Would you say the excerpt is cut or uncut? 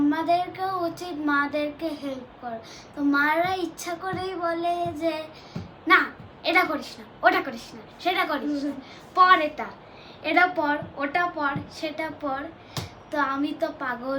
uncut